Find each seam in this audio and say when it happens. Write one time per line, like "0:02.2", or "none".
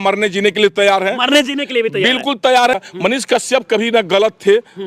0:02.8